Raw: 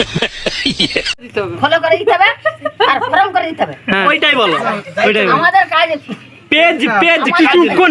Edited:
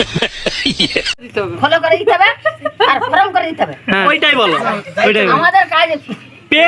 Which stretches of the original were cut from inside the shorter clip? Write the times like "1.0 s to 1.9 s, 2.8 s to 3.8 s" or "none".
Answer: none